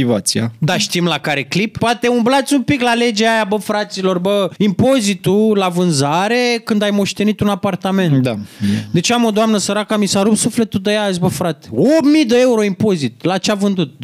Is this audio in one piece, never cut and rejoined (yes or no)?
no